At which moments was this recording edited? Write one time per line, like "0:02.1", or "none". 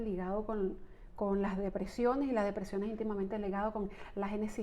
none